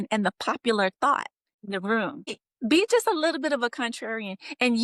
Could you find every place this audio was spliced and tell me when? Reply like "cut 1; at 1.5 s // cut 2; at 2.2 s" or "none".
cut 1; at 1.5 s // cut 2; at 2.4 s